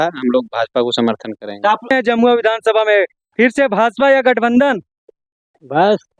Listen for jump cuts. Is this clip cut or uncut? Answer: cut